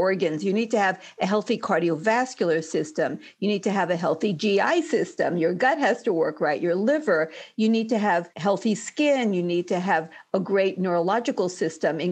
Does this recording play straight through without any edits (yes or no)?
yes